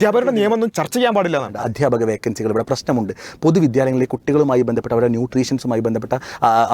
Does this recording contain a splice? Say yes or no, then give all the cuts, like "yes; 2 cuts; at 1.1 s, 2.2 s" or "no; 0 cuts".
yes; 2 cuts; at 0.7 s, 1.6 s